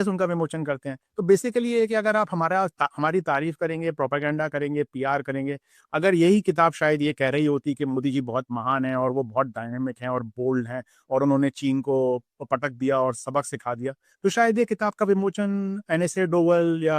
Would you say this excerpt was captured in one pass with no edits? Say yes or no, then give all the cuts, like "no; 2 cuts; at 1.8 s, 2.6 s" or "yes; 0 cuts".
yes; 0 cuts